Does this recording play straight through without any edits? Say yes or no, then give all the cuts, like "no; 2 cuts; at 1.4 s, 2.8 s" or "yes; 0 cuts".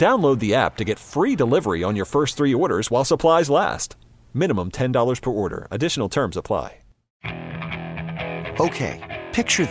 no; 1 cut; at 7.2 s